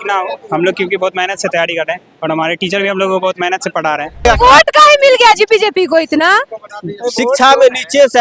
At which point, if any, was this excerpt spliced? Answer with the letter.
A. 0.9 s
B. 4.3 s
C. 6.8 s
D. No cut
B